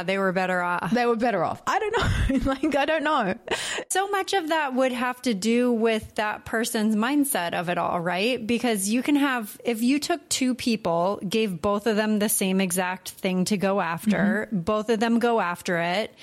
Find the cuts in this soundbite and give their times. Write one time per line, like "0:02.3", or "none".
none